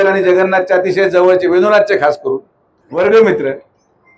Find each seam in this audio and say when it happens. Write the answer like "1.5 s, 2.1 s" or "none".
2.8 s